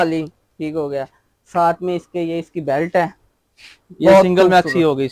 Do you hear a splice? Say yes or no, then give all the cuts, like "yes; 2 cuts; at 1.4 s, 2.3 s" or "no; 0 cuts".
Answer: no; 0 cuts